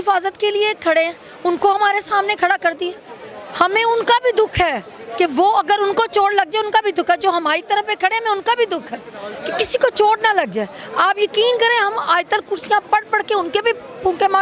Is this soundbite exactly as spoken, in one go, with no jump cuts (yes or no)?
yes